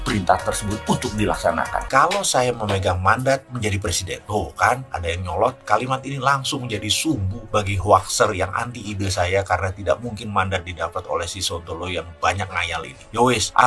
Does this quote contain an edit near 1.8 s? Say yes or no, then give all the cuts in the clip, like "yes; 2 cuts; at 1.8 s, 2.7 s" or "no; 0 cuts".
yes; 1 cut; at 1.8 s